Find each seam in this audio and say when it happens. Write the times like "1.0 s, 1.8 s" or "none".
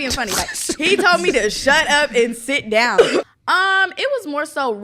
3.3 s